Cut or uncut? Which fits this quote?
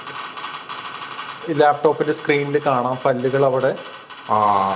cut